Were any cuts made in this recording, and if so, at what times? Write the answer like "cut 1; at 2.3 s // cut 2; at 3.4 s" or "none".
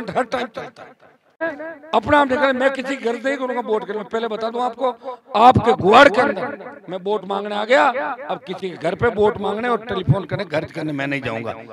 cut 1; at 1.4 s